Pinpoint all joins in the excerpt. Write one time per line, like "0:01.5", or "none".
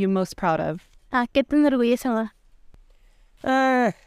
0:00.9